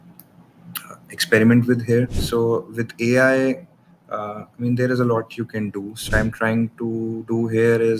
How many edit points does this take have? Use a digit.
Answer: 2